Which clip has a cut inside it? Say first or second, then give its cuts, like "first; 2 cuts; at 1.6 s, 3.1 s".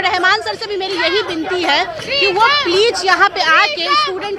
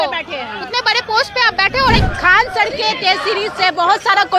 second; 1 cut; at 2.0 s